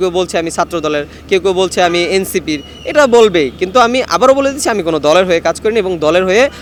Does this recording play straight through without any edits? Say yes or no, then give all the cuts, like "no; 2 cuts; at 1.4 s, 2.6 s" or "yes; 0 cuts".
yes; 0 cuts